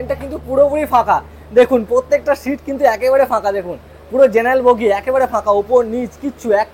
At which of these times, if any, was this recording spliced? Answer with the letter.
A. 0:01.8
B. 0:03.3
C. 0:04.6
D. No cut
D